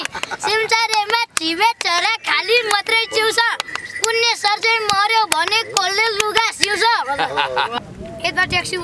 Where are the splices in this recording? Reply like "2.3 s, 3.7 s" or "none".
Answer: 7.8 s